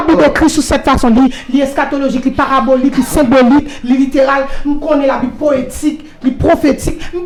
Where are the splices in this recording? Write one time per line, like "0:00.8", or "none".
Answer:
none